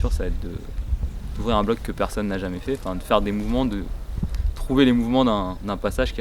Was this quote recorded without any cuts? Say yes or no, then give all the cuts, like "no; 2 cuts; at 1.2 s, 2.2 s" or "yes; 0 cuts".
yes; 0 cuts